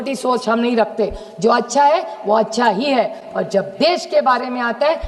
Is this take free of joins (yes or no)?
yes